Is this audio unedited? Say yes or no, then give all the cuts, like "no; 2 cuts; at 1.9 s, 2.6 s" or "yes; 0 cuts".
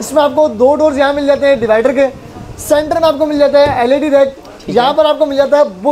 yes; 0 cuts